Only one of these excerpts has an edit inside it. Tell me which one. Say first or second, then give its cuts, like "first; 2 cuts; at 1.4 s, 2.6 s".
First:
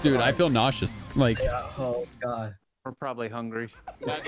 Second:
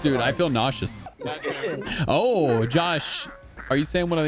second; 1 cut; at 0.9 s